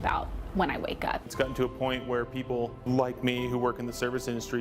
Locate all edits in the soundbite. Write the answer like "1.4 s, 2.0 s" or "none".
1.2 s, 2.8 s